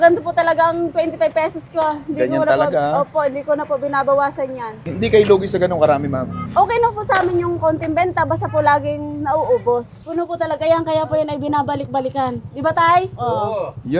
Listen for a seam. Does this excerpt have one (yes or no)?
yes